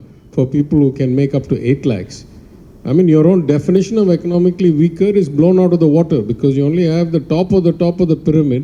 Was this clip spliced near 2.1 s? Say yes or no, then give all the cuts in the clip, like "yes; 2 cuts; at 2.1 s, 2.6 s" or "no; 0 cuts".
no; 0 cuts